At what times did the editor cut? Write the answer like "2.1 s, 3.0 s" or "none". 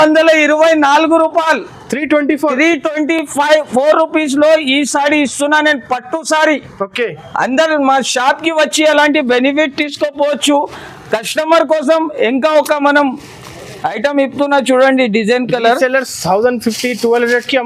none